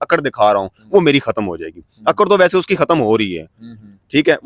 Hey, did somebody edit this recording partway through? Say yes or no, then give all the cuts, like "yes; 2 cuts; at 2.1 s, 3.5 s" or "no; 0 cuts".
no; 0 cuts